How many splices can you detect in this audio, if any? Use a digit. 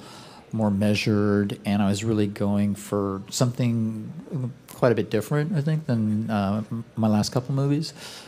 0